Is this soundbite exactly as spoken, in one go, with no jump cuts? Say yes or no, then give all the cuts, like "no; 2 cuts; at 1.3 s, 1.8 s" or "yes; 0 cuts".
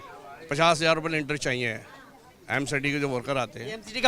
yes; 0 cuts